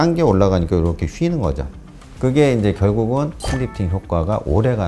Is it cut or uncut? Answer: cut